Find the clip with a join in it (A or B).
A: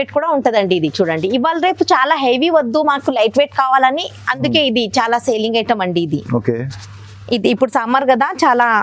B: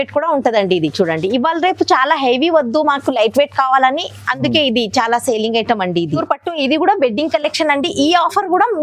B